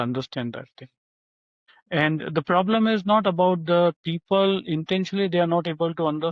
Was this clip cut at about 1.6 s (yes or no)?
yes